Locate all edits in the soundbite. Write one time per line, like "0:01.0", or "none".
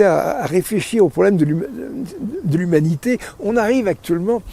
none